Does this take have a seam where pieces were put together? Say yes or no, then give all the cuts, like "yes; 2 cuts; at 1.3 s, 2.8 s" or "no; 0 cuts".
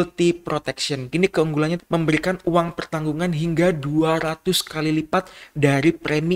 yes; 2 cuts; at 1.1 s, 1.8 s